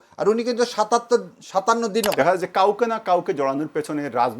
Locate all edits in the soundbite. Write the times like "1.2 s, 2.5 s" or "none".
2.1 s